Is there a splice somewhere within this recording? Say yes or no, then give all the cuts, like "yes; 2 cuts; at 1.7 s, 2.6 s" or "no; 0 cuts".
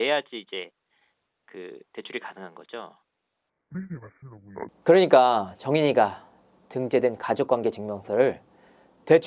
yes; 1 cut; at 4.7 s